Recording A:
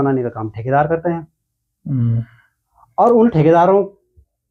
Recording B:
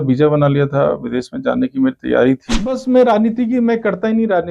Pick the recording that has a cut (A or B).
B